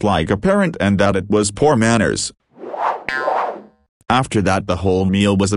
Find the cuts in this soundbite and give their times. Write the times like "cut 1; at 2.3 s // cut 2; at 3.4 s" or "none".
cut 1; at 2.3 s // cut 2; at 3.9 s